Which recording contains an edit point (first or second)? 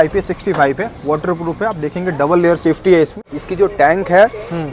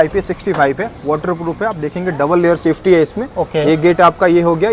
first